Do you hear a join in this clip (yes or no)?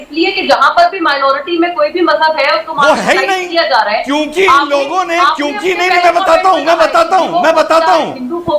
no